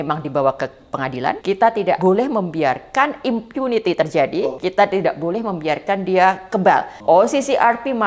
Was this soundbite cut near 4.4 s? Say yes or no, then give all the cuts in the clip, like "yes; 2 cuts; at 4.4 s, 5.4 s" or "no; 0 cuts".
yes; 3 cuts; at 1.9 s, 4.4 s, 6.9 s